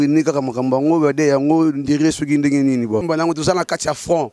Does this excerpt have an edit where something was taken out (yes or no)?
yes